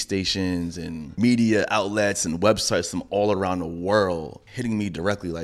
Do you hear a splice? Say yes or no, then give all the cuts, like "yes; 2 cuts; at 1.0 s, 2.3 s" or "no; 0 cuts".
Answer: yes; 2 cuts; at 1.1 s, 4.4 s